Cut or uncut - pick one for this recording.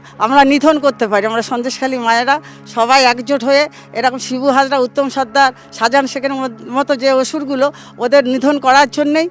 uncut